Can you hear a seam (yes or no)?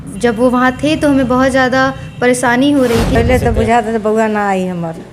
yes